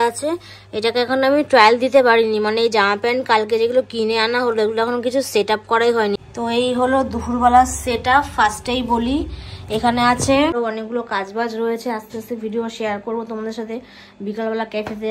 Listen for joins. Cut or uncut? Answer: cut